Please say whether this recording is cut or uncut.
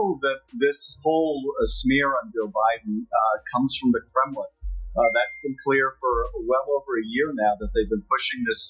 uncut